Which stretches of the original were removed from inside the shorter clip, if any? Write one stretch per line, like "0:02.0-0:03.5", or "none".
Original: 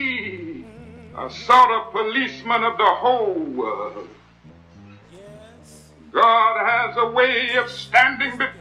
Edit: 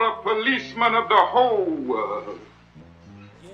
none